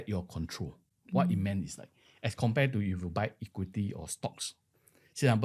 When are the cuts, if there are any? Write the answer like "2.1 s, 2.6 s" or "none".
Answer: none